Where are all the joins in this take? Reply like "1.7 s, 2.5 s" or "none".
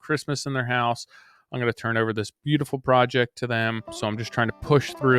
3.9 s